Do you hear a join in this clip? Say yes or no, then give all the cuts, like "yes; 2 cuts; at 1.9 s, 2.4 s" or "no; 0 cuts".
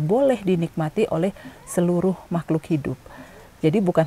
no; 0 cuts